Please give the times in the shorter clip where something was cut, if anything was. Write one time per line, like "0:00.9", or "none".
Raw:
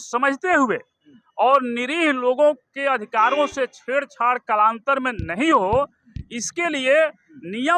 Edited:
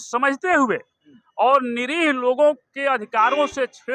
none